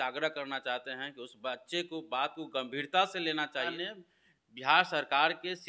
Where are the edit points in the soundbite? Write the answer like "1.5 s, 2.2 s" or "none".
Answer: 3.7 s